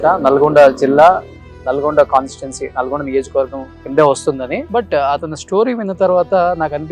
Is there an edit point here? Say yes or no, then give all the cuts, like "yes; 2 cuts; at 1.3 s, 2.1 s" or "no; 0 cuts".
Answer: yes; 1 cut; at 4.6 s